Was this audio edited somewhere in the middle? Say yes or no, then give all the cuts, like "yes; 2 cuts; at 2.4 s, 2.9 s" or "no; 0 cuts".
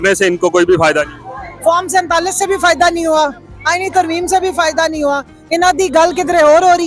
no; 0 cuts